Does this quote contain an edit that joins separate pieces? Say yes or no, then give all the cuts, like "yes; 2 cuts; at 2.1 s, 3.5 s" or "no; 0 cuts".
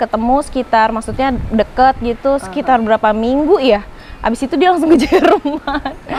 no; 0 cuts